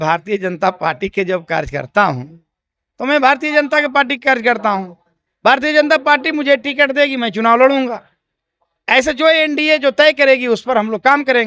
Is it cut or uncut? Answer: uncut